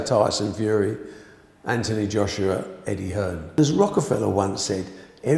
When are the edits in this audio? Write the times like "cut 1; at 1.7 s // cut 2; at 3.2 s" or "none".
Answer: cut 1; at 3.6 s